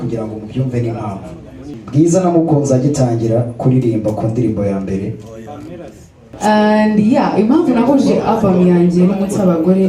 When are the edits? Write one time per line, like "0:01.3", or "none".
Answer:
0:01.8
0:06.2

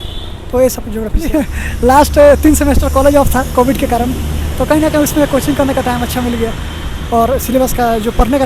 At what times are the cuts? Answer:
0:01.3

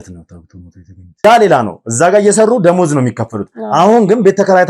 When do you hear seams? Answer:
0:01.2

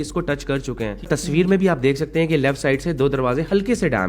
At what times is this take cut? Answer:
0:01.1

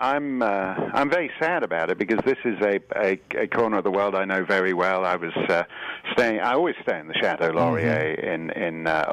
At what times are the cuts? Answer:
0:01.6

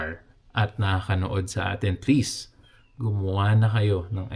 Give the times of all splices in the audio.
none

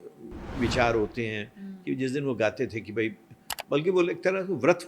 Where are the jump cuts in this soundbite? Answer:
none

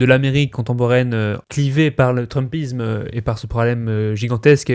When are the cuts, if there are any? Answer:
0:01.4

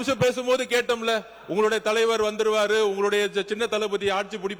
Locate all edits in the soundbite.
none

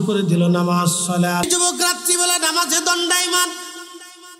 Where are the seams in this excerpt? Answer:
0:01.4

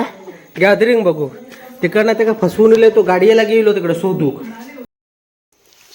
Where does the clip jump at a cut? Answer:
0:05.0

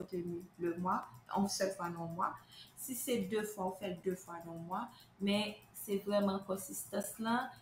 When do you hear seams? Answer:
0:01.2

